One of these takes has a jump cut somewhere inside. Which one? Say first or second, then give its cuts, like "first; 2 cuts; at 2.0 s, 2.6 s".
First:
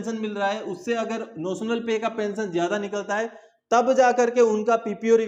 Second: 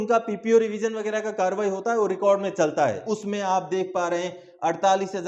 second; 1 cut; at 3.0 s